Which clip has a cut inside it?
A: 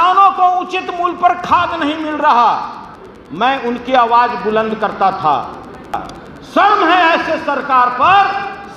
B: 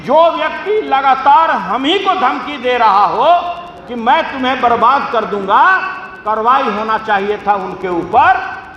A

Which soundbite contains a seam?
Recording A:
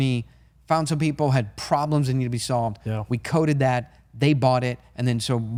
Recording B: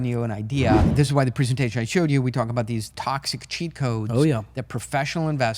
B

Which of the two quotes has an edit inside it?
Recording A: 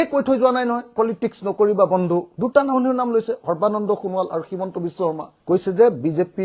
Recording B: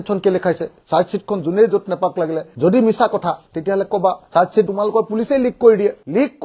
A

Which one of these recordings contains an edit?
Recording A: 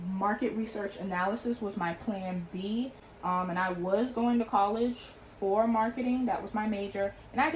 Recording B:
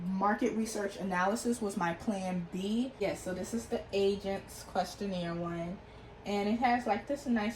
B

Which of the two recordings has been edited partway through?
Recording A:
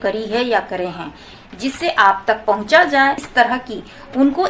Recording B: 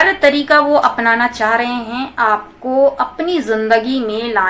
A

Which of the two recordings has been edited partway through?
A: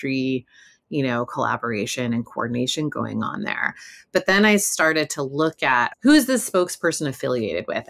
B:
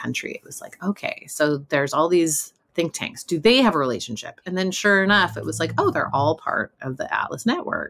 A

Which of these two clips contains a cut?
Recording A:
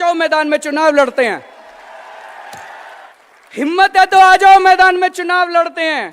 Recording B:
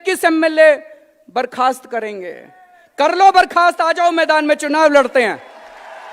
A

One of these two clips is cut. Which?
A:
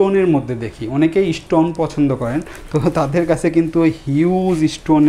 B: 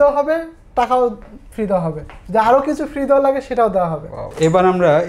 B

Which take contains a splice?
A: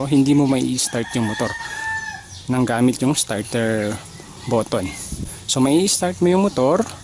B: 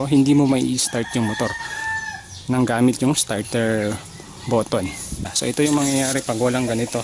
B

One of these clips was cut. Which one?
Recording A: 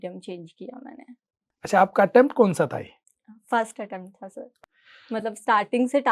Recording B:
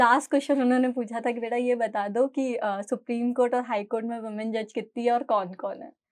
A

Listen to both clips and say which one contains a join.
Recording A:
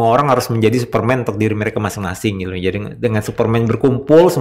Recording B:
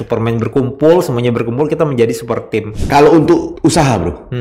B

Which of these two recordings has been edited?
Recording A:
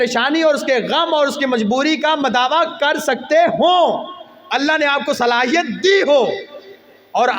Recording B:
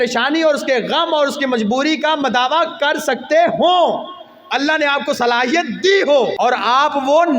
B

